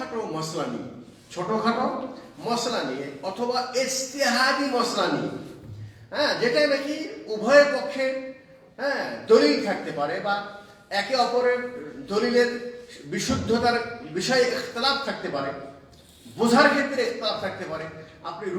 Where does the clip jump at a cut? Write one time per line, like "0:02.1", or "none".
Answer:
none